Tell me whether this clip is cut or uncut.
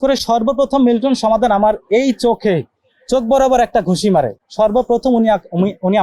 uncut